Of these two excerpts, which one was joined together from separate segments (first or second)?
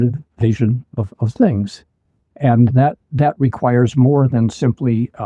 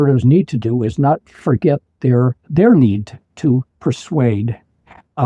second